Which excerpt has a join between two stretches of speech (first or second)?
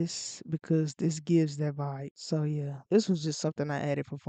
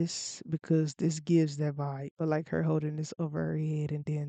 second